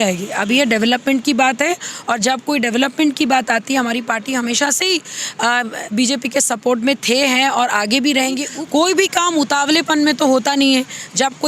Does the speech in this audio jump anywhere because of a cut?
yes; 1 cut; at 8.5 s

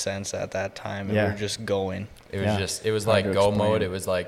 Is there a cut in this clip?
no; 0 cuts

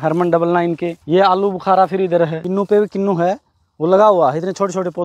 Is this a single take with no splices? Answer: no; 2 cuts; at 1.0 s, 2.4 s

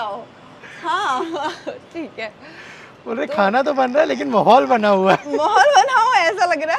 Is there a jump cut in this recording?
no; 0 cuts

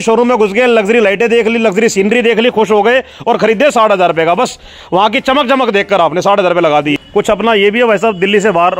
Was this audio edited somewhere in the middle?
no; 0 cuts

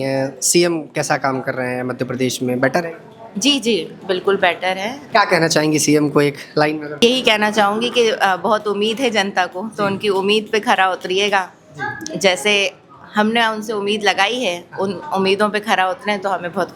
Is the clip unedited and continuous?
no; 2 cuts; at 4.9 s, 7.0 s

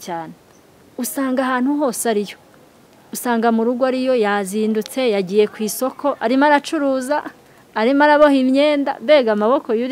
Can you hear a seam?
no; 0 cuts

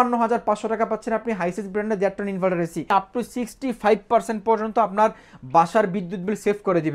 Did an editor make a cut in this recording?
yes; 1 cut; at 2.9 s

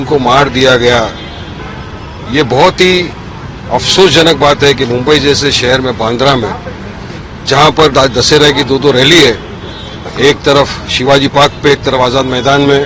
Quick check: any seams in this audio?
no; 0 cuts

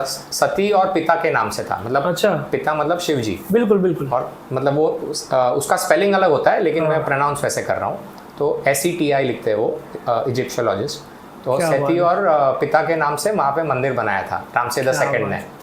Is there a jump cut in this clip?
no; 0 cuts

